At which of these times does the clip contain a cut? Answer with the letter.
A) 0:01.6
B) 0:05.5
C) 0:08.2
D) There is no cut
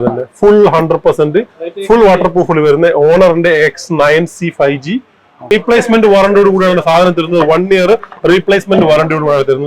B